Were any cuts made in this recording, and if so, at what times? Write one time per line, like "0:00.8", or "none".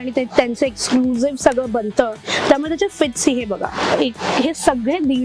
none